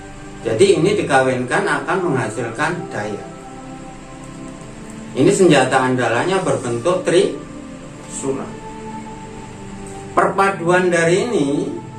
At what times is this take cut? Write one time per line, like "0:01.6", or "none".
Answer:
none